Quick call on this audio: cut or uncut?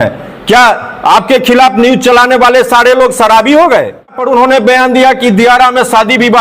cut